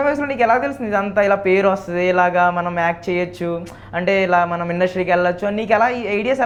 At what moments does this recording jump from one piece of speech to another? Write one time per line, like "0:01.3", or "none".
none